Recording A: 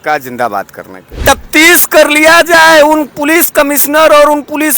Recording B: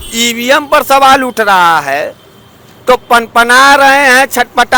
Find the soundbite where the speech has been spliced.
A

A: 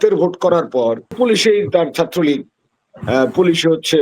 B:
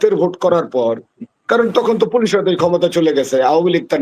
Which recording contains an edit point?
A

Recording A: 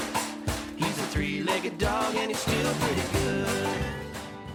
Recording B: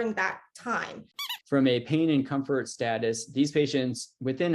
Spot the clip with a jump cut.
B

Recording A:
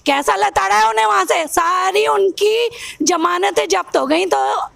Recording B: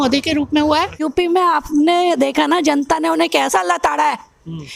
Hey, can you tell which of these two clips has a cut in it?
B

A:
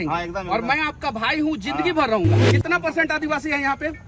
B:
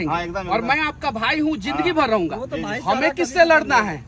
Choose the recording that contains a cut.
A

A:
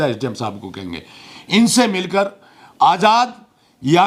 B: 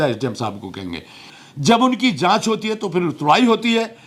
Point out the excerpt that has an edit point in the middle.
B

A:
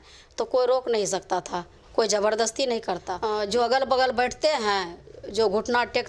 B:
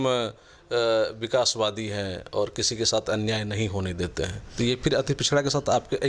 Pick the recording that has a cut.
A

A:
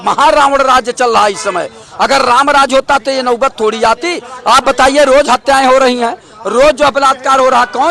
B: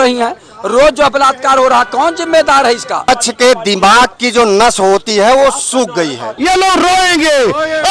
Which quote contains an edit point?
B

